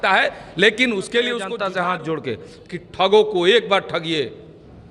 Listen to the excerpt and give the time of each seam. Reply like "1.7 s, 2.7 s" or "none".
1.5 s